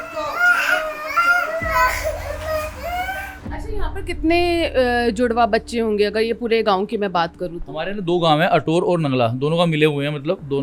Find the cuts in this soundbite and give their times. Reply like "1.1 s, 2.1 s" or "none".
3.5 s